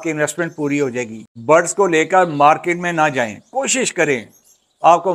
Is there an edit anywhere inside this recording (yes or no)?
yes